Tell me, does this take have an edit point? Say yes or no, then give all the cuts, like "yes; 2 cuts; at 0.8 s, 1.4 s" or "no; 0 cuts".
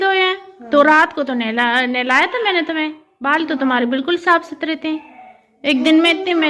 no; 0 cuts